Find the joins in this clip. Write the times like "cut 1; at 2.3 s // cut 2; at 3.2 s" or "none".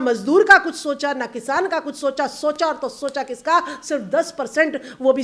none